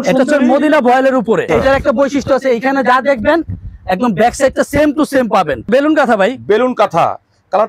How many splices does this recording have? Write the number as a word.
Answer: two